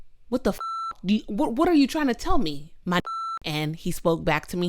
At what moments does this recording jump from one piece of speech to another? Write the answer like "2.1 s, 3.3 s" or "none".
3.0 s